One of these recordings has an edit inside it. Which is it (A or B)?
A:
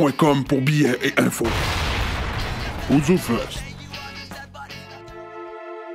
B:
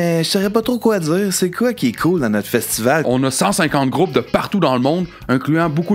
A